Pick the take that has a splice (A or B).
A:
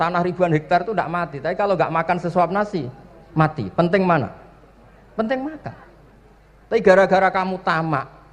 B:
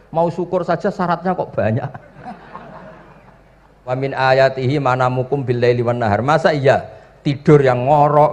B